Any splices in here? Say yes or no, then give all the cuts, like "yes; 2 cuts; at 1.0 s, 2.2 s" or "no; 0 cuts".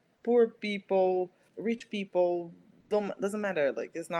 yes; 1 cut; at 1.5 s